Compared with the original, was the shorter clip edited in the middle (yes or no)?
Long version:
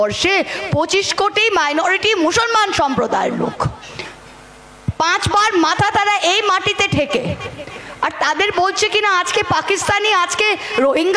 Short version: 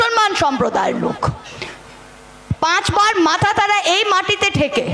no